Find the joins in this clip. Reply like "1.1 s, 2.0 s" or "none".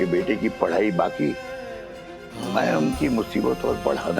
2.4 s